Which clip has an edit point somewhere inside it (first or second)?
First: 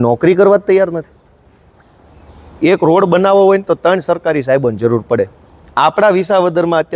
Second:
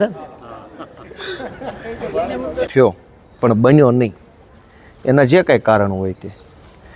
second